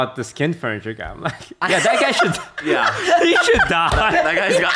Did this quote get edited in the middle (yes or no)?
no